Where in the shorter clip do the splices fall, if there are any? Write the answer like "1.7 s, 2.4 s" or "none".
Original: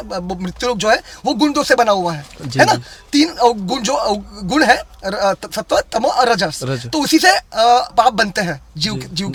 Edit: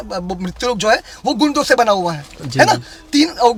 none